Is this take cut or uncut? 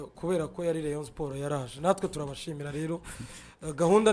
uncut